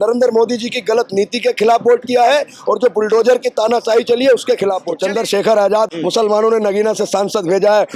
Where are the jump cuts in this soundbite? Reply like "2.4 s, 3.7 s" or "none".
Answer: 4.9 s, 5.9 s